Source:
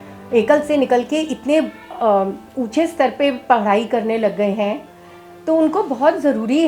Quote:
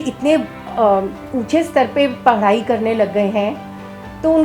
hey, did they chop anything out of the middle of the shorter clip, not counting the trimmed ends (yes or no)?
no